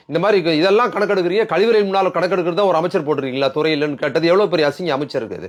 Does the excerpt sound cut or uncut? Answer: uncut